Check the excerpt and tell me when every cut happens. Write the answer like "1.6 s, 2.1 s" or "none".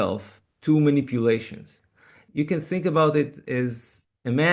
2.2 s, 3.5 s